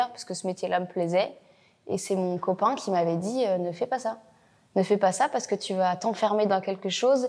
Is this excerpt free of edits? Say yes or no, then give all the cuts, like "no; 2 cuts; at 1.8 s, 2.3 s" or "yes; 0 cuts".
yes; 0 cuts